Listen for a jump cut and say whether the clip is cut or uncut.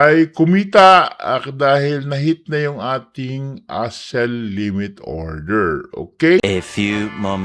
cut